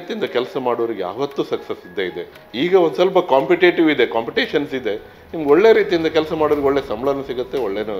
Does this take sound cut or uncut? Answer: uncut